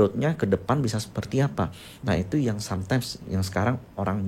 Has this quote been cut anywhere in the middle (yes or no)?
no